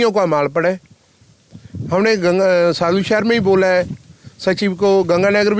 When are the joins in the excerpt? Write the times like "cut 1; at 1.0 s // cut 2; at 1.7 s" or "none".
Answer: none